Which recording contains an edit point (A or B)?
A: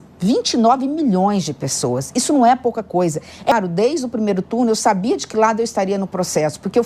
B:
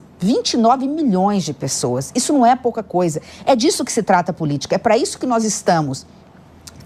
A